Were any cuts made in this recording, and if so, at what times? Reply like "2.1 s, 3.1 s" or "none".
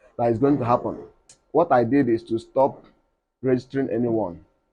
1.3 s

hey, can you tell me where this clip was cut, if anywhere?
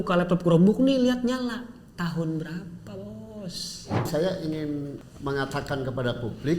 4.1 s, 5.0 s

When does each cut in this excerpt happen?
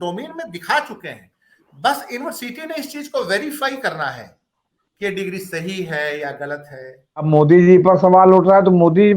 7.3 s

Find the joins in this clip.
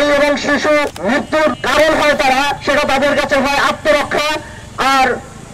1.5 s, 2.6 s

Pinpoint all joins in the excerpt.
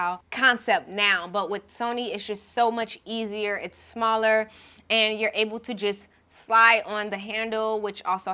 none

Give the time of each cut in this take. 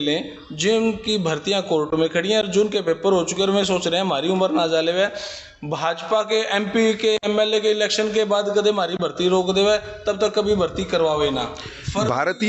none

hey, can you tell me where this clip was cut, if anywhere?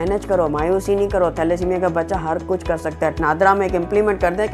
3.1 s

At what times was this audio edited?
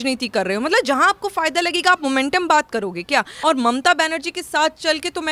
3.3 s

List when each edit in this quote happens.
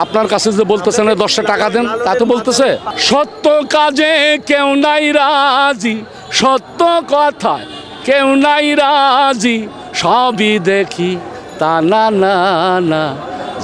2.9 s

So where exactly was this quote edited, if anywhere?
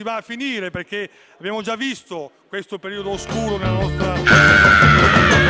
4.2 s

